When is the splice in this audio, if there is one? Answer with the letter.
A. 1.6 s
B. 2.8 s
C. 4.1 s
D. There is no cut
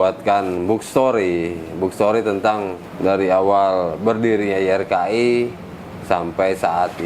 B